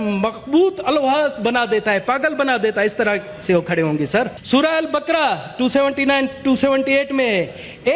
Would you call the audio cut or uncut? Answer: cut